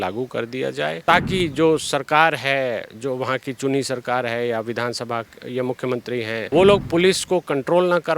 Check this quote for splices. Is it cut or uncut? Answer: cut